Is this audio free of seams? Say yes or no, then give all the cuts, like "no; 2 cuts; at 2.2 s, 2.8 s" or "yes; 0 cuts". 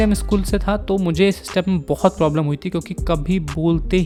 yes; 0 cuts